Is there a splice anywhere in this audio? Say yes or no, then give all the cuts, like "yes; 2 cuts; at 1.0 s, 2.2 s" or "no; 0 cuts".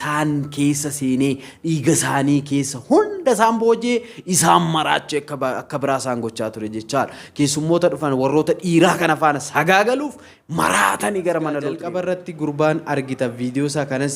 yes; 1 cut; at 11.8 s